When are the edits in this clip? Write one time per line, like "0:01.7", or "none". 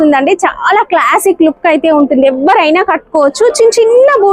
none